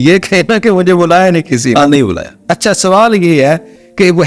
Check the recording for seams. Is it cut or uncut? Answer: uncut